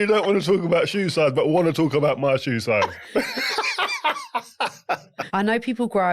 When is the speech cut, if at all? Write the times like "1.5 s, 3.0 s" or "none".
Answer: 3.0 s, 5.1 s